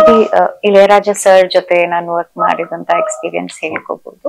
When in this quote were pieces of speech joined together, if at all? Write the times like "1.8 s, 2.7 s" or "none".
none